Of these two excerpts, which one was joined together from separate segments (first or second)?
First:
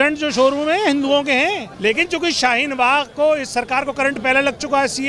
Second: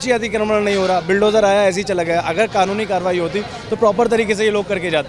first